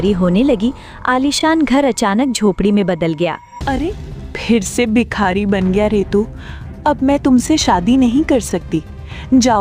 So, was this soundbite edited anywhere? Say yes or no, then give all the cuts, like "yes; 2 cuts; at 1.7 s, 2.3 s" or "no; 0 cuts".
yes; 1 cut; at 3.5 s